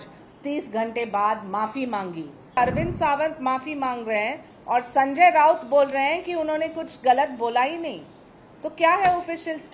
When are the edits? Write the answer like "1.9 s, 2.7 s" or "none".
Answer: 2.6 s